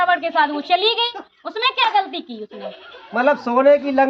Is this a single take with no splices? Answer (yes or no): yes